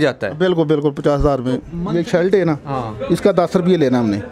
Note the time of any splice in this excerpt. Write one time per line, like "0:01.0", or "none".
0:01.8